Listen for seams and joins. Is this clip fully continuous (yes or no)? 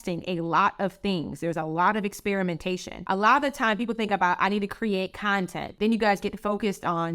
no